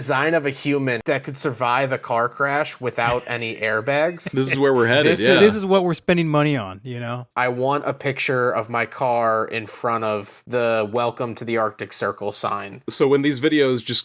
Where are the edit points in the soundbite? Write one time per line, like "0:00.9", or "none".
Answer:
0:01.0
0:05.2
0:07.2
0:12.9